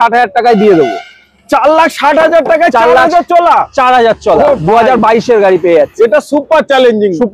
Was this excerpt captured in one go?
yes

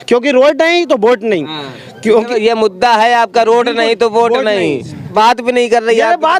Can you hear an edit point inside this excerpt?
yes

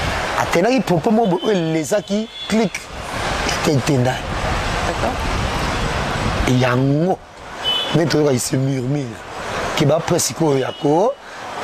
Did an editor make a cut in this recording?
no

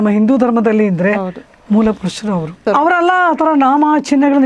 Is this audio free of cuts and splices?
no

